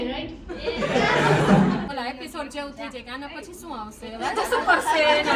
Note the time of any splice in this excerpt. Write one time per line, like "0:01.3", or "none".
0:01.9